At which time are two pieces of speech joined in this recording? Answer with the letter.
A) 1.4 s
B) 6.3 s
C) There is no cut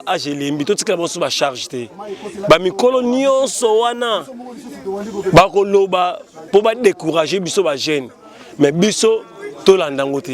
C